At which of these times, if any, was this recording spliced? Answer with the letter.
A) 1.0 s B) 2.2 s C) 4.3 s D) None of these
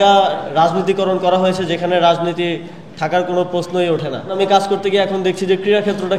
C